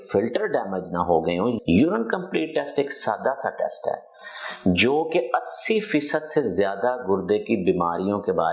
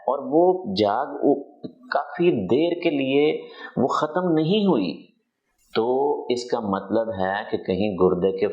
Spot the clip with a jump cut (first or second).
first